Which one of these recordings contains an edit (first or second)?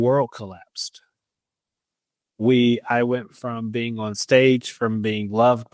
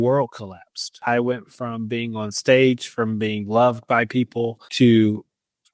second